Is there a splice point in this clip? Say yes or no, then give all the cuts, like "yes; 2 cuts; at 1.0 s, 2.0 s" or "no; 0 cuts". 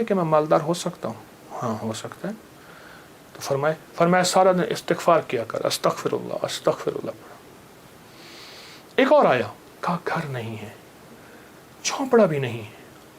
no; 0 cuts